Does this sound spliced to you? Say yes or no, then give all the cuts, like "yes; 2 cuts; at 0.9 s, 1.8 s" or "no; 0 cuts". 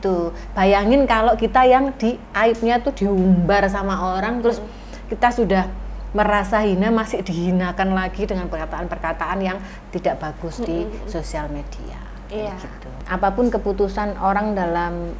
yes; 1 cut; at 13.0 s